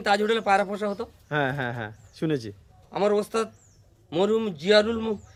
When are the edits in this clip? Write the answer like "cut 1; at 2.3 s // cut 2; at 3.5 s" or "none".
none